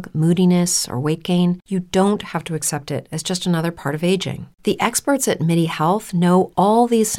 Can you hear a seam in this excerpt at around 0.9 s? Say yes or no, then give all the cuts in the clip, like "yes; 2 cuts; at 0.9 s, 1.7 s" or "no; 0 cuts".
no; 0 cuts